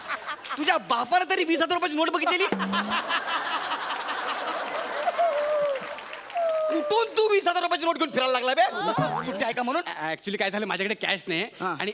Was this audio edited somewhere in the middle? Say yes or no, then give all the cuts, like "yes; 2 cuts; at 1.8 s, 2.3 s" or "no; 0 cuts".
no; 0 cuts